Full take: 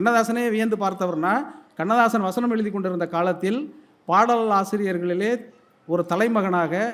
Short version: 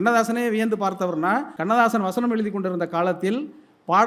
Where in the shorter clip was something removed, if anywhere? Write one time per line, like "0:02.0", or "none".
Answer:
0:01.5